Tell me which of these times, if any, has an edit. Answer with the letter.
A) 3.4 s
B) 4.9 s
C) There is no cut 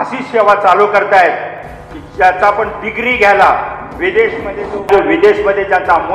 B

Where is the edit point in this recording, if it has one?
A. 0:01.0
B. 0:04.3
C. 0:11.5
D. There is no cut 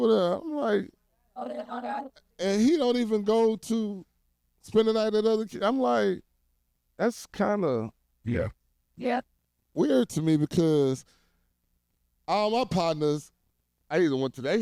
D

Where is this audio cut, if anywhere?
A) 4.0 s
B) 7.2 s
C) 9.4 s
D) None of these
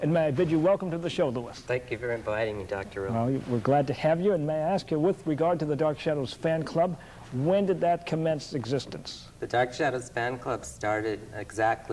D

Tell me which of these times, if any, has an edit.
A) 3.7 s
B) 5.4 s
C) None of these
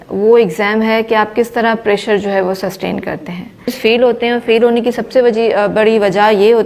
A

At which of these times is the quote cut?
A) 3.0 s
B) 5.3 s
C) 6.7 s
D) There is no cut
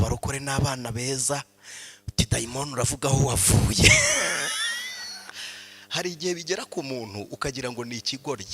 B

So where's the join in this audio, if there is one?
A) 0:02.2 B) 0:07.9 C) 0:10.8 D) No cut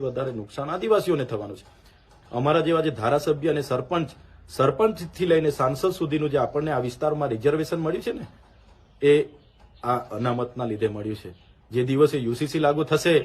A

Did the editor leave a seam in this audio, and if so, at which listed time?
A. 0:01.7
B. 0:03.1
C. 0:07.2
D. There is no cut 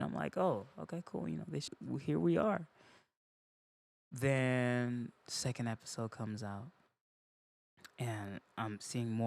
A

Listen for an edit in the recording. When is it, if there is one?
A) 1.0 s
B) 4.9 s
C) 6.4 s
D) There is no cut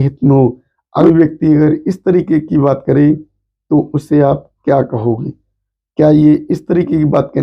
A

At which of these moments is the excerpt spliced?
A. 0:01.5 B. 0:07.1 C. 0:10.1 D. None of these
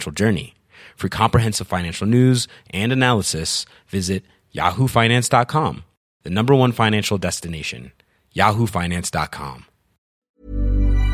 C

